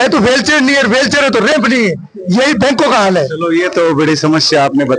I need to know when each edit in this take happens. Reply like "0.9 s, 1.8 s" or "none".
none